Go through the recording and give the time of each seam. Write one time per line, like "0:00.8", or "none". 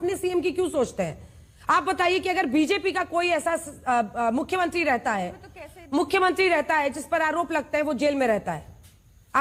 none